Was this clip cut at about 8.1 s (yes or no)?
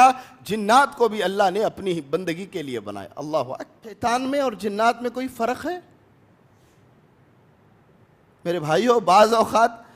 no